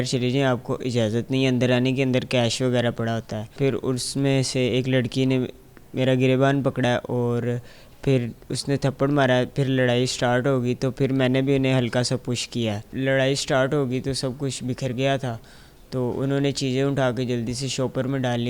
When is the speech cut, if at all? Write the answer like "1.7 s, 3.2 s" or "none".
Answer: 3.6 s, 12.9 s